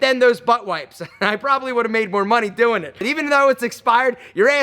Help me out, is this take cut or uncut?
cut